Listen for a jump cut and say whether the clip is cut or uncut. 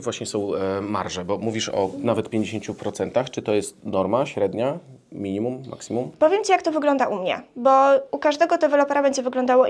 uncut